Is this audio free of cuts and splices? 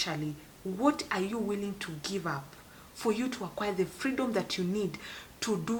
yes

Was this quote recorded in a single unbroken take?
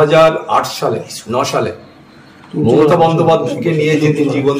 yes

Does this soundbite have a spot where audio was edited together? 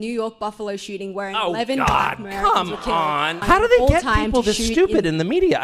yes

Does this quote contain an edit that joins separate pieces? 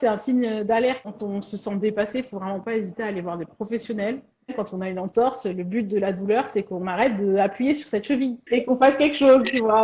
yes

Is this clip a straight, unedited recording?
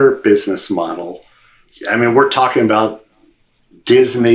no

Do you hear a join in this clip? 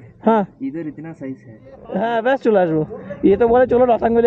yes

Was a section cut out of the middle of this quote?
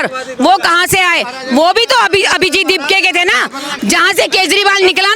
yes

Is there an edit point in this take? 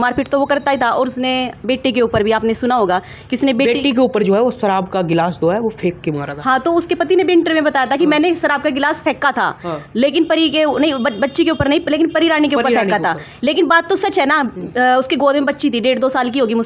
no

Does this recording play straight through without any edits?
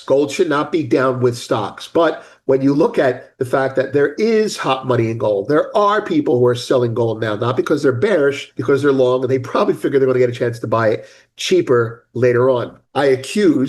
no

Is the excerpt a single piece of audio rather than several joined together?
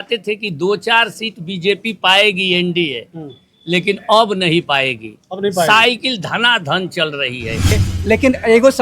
no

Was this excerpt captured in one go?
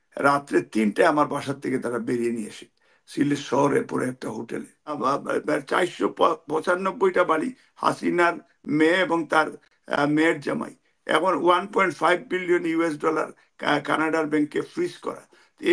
no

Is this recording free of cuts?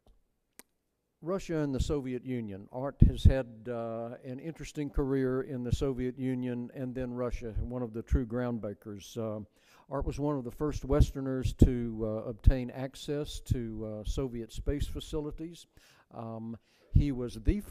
yes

